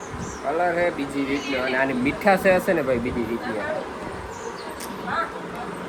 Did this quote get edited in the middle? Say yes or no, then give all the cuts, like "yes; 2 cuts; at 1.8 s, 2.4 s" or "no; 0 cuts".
no; 0 cuts